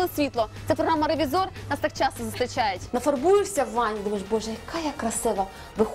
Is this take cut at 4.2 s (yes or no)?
no